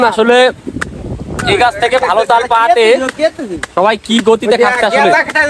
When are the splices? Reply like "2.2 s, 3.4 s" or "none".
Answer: none

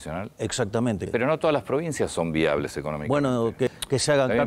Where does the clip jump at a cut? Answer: 1.0 s, 3.7 s

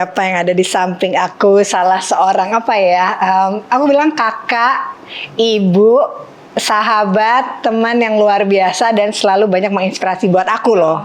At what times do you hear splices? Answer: none

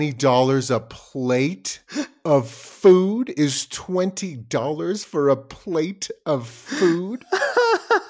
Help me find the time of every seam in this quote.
7.2 s

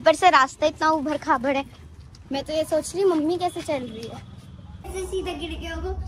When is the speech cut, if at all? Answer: 4.9 s

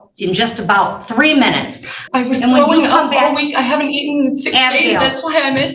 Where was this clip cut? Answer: 1.9 s

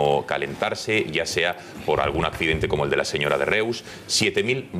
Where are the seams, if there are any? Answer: 1.8 s

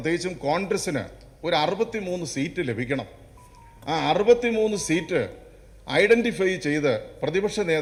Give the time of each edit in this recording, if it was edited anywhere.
none

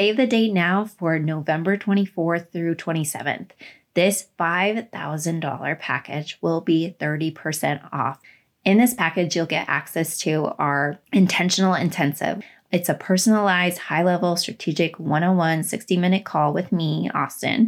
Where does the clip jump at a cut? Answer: 8.3 s, 11.0 s, 12.4 s

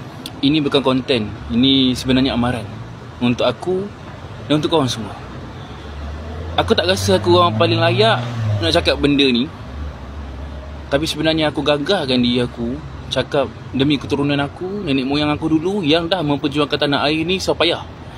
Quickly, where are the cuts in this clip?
none

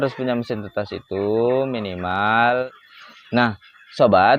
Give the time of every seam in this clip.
2.8 s

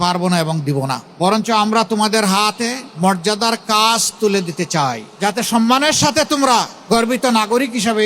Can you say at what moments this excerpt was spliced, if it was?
1.0 s, 2.8 s, 5.1 s, 6.8 s

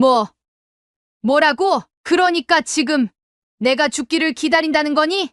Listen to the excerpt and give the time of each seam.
1.9 s

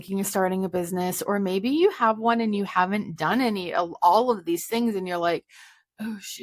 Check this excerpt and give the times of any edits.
none

